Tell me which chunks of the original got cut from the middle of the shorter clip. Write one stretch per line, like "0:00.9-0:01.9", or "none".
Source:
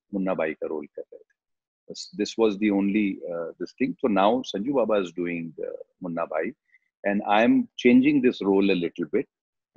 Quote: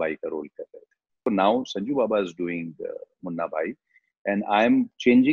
0:01.6-0:04.0